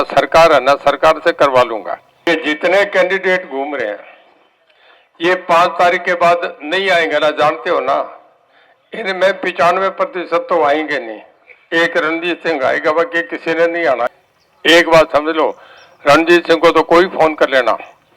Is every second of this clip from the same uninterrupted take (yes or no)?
no